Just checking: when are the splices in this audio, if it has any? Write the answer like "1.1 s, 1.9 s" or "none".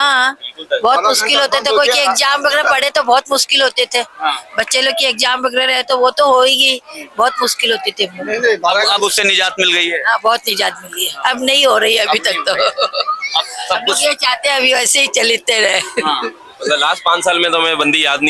none